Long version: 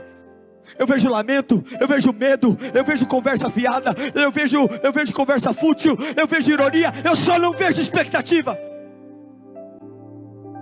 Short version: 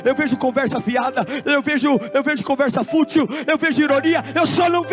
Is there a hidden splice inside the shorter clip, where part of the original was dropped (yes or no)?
no